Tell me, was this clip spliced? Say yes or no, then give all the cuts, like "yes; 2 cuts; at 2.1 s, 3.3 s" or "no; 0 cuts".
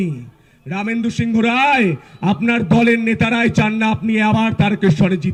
no; 0 cuts